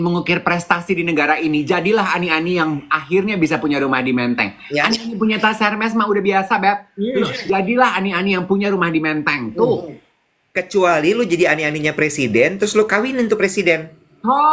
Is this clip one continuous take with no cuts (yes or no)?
yes